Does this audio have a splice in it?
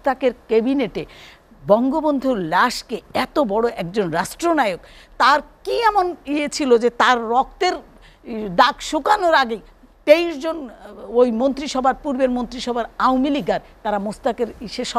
no; 0 cuts

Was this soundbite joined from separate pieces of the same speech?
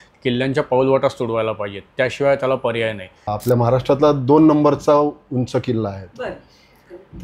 yes; 1 cut; at 3.3 s

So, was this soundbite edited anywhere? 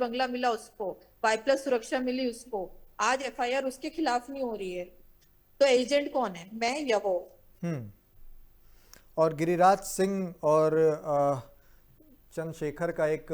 no; 0 cuts

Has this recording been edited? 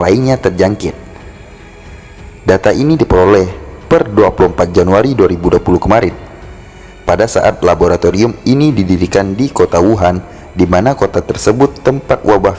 no; 0 cuts

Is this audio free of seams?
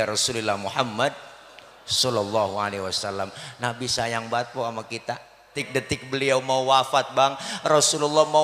no; 1 cut; at 5.6 s

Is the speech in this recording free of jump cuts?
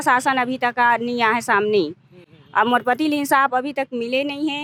yes; 0 cuts

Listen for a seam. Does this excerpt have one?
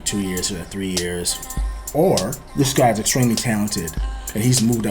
yes; 2 cuts; at 1.8 s, 2.4 s

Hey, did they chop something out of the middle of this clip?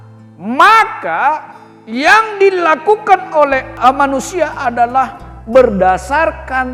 yes; 1 cut; at 3.8 s

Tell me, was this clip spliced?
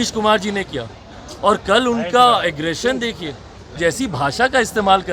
yes; 1 cut; at 3.8 s

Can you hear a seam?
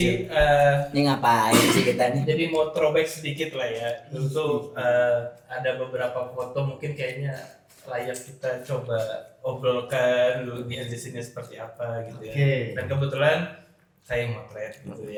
no; 0 cuts

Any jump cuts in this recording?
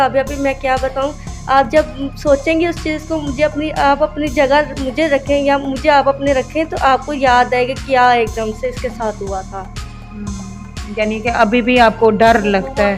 no; 0 cuts

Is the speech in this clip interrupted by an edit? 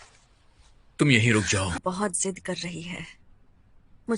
yes; 1 cut; at 1.8 s

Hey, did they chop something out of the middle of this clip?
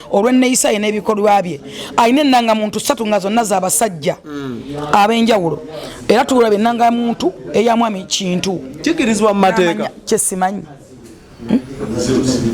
no; 0 cuts

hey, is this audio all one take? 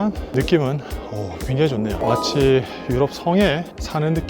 no; 1 cut; at 1.9 s

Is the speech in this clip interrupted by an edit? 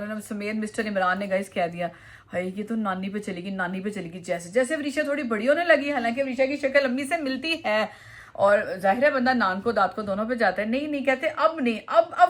no; 0 cuts

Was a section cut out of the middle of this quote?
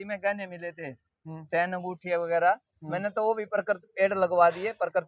no; 0 cuts

